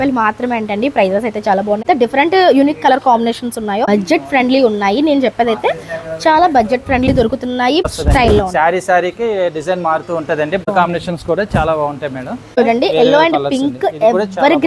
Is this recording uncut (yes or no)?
no